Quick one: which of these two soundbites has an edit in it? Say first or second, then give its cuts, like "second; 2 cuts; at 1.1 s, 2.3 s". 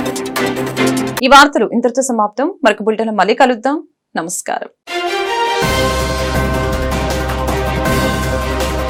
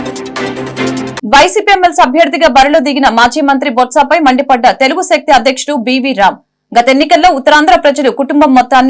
second; 1 cut; at 1.2 s